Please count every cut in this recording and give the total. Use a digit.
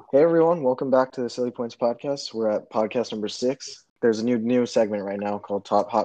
1